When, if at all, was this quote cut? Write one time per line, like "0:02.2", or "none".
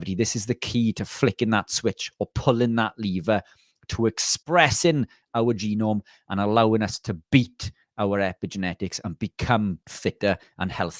0:09.9